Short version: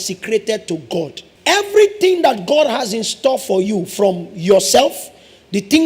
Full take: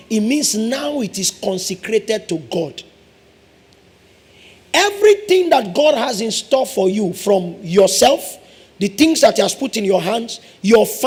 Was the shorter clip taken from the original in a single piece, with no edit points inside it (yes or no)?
no